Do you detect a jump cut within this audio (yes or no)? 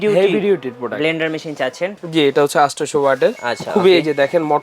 yes